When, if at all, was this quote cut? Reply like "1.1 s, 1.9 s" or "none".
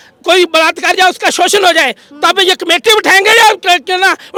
none